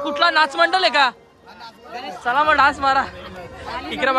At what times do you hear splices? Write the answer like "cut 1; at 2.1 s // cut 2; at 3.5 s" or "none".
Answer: none